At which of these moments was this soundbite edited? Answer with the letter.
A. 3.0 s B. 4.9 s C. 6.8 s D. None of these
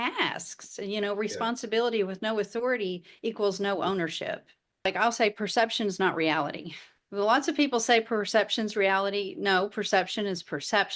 B